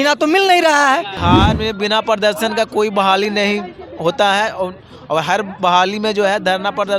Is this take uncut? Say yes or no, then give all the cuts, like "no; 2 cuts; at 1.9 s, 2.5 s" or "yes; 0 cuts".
no; 1 cut; at 1.1 s